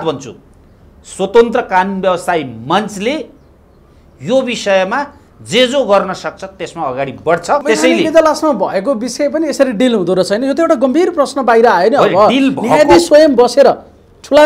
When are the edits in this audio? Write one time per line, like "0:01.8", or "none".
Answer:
0:07.6